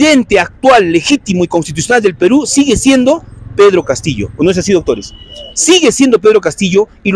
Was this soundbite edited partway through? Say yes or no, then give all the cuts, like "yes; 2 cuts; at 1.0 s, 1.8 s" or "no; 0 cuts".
no; 0 cuts